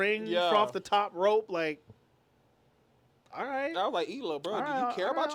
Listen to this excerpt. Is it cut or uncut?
uncut